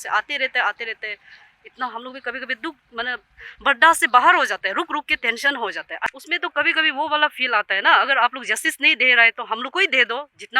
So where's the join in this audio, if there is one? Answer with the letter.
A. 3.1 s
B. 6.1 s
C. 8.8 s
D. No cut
B